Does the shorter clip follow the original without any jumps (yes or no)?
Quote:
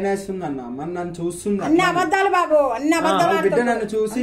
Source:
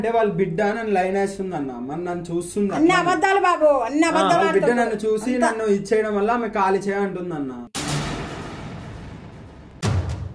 yes